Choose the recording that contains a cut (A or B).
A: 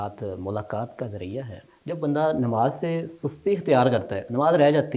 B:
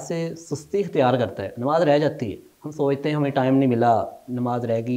A